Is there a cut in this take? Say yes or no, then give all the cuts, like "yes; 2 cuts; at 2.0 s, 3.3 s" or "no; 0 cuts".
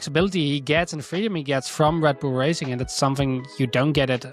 no; 0 cuts